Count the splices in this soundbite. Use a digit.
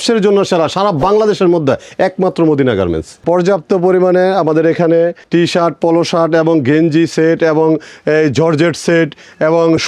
2